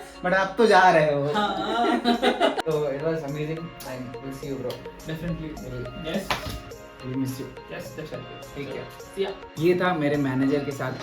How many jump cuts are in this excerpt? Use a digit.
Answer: 1